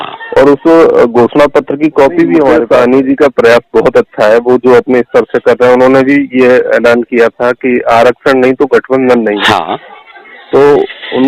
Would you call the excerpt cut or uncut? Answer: cut